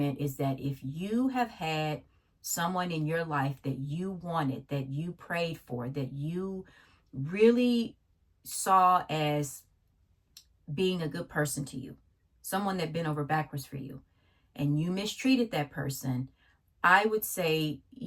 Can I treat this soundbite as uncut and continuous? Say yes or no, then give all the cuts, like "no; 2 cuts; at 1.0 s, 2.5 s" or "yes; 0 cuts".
yes; 0 cuts